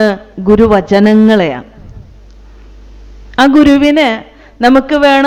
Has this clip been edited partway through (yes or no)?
no